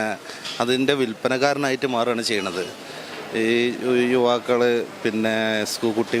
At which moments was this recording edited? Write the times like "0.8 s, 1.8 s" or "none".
none